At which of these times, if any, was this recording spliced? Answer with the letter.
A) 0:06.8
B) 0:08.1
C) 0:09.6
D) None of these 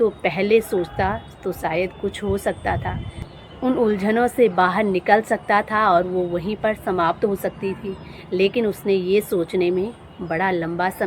D